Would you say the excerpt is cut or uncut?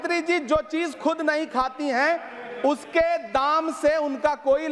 uncut